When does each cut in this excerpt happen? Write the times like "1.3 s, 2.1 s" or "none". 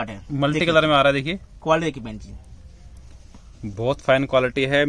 none